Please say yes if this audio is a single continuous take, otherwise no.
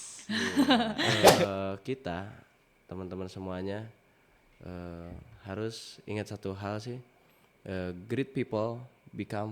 no